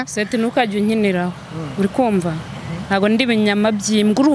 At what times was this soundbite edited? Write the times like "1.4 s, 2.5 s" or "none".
none